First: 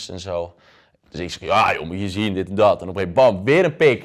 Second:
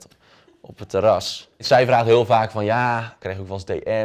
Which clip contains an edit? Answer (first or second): second